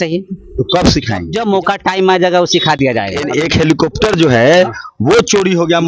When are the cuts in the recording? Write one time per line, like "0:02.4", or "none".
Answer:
0:01.3
0:03.2